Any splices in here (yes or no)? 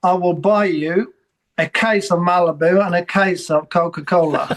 no